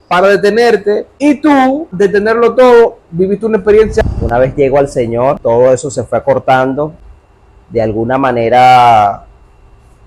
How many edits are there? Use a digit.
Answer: 4